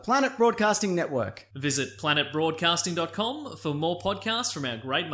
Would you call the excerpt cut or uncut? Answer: uncut